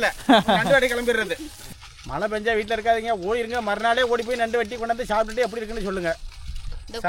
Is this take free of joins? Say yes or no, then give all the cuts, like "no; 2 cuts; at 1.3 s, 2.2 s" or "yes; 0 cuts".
no; 1 cut; at 1.7 s